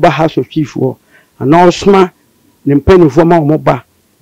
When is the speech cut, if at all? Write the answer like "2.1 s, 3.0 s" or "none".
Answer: none